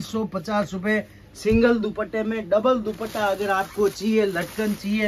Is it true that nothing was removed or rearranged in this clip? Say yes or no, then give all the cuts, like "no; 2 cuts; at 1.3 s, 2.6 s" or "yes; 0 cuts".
yes; 0 cuts